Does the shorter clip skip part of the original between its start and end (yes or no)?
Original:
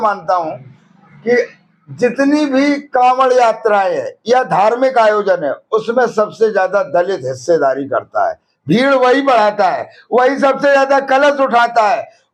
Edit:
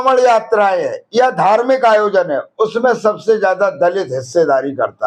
no